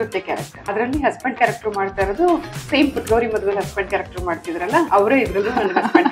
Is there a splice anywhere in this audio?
yes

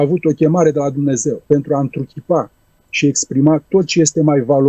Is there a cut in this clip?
yes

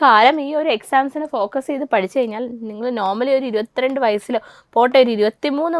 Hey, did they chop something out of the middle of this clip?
no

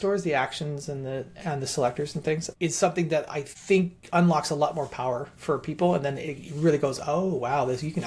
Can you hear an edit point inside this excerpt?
no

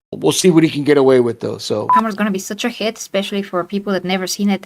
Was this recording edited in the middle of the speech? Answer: yes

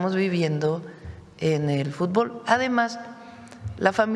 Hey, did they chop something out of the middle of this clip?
no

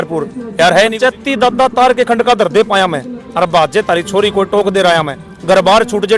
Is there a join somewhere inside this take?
yes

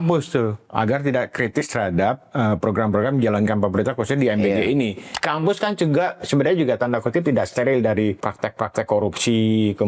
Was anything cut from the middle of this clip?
yes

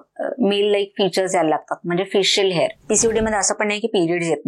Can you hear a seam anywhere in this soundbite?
yes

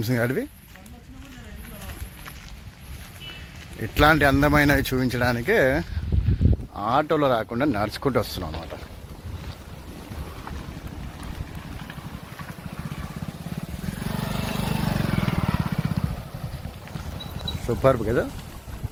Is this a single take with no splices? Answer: yes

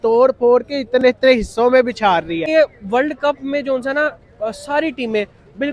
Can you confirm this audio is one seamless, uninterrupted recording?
no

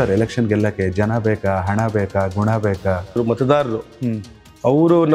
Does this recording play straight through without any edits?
no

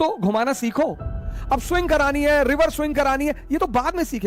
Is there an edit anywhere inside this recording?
no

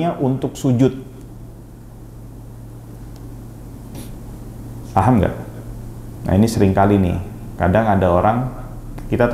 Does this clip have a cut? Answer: no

